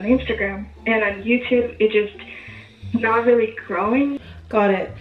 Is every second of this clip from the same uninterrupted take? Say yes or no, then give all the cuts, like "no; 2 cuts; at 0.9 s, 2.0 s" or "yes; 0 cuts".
yes; 0 cuts